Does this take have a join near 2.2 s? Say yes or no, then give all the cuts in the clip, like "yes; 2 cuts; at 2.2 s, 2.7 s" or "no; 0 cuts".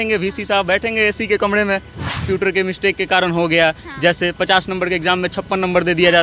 yes; 1 cut; at 2.2 s